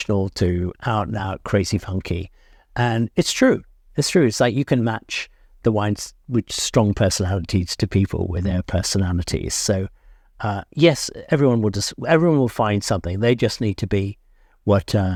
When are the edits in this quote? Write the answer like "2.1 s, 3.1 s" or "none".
none